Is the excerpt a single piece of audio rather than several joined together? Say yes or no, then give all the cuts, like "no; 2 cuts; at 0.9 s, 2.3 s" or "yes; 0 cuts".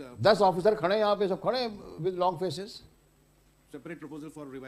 yes; 0 cuts